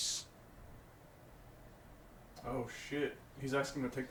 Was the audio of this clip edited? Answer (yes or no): no